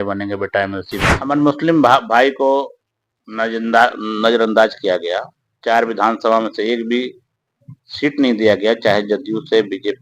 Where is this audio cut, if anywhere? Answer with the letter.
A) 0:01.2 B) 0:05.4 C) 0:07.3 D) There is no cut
A